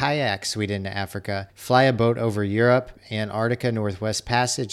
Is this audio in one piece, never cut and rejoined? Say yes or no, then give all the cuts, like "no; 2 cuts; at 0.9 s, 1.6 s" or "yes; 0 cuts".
no; 2 cuts; at 1.5 s, 3.0 s